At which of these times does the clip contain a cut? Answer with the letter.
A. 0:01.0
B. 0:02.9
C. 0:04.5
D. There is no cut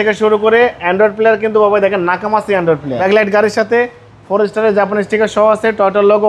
B